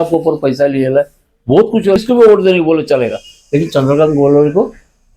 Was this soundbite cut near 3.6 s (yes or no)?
no